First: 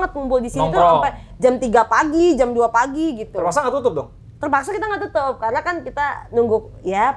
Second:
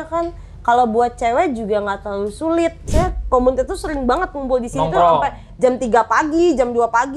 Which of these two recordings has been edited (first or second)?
second